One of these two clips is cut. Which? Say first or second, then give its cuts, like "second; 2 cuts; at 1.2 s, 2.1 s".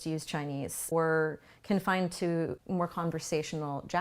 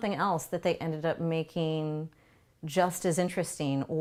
first; 2 cuts; at 0.9 s, 2.6 s